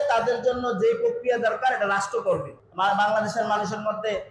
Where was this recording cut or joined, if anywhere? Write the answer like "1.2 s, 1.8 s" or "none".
2.5 s